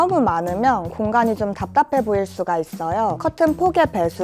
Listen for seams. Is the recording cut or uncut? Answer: cut